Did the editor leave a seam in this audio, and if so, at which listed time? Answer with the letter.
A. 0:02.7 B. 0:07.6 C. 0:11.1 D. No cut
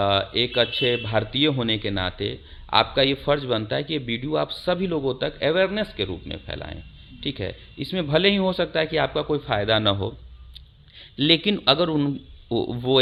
D